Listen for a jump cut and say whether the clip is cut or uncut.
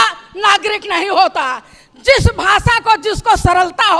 uncut